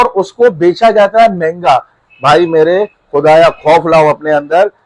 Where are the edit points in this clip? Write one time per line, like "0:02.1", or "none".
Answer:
none